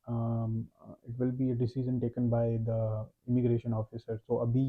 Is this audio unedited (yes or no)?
yes